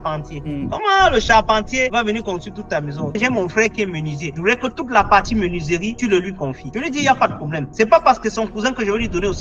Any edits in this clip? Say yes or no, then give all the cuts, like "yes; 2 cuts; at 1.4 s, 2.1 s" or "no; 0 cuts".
yes; 1 cut; at 3.2 s